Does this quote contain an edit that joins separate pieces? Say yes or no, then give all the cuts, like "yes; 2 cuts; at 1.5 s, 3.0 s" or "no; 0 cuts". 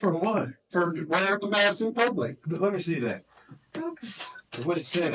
no; 0 cuts